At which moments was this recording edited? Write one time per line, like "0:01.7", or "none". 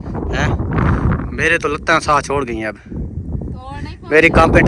none